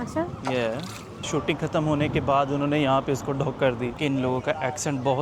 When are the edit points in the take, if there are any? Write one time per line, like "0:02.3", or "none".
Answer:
0:01.2
0:04.0